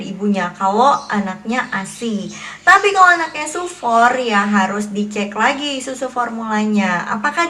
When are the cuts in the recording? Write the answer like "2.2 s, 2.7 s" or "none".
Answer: none